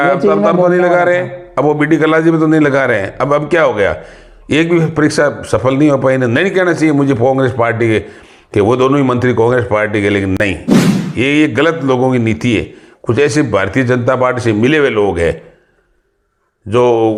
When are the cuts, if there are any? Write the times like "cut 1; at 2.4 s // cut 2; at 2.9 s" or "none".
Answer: none